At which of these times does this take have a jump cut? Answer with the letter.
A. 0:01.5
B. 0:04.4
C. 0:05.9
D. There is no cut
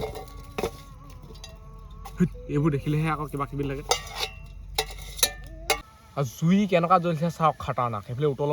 C